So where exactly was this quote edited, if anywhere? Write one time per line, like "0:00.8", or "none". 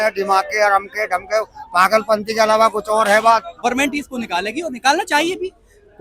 0:03.6